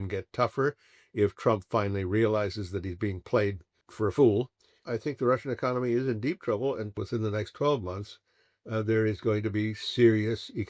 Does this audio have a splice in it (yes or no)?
yes